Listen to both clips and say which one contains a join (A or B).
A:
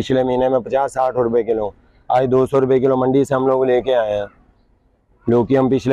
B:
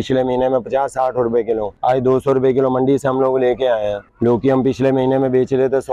B